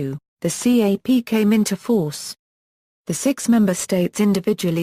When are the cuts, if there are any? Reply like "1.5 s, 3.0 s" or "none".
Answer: 2.6 s